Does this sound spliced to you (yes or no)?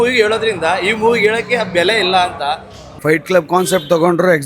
yes